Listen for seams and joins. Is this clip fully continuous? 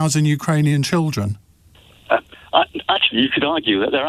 no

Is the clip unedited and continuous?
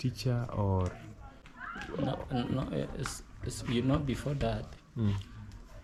yes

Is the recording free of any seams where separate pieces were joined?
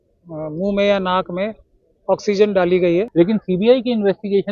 no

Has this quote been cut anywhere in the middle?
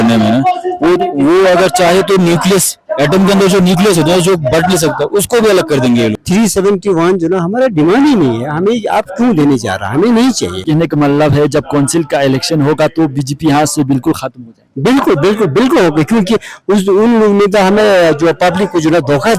yes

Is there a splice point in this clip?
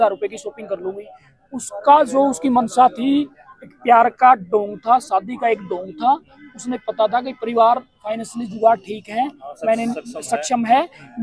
no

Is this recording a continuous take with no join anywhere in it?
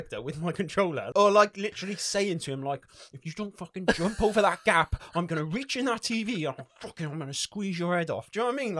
no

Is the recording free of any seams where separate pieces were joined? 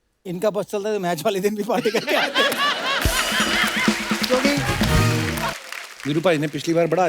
no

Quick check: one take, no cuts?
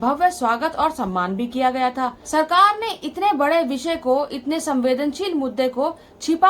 no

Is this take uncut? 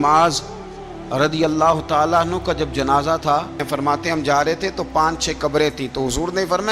no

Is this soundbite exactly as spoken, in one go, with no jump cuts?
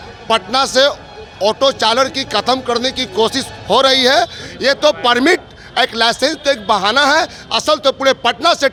yes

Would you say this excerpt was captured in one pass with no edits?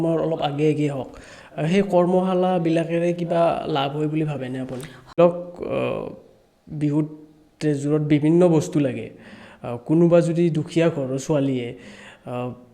no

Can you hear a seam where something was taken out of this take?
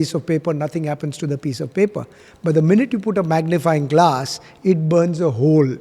no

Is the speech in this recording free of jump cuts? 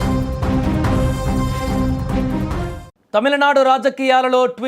no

